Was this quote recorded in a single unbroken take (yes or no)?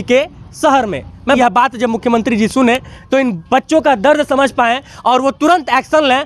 no